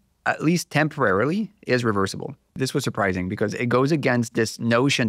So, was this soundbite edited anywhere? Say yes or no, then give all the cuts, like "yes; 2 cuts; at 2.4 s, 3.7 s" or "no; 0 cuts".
yes; 1 cut; at 2.5 s